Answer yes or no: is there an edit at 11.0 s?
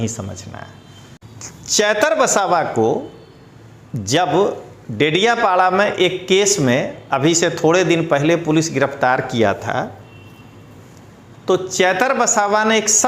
no